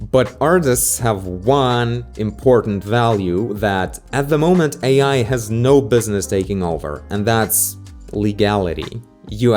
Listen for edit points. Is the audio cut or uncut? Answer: uncut